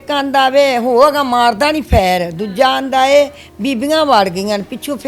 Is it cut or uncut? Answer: uncut